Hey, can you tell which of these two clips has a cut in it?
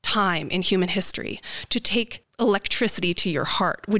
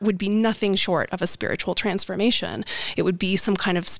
first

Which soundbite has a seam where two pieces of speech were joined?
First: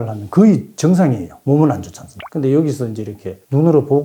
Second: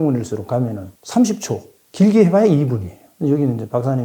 first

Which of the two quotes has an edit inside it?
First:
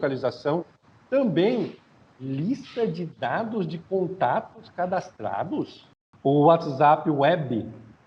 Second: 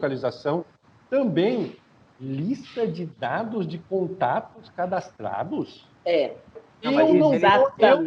first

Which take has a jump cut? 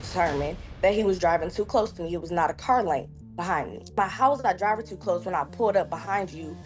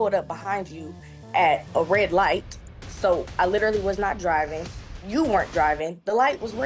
first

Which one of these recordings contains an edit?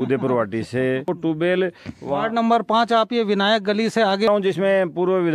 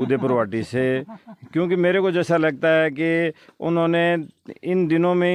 first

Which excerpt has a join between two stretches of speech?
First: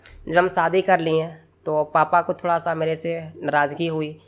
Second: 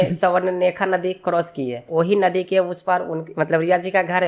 second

